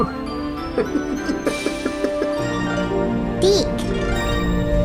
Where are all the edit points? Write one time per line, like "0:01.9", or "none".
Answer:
none